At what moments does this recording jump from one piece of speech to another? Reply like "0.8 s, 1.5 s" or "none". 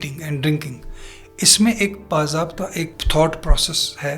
3.0 s